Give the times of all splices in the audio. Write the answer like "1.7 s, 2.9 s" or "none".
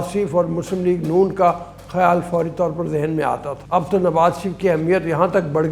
3.5 s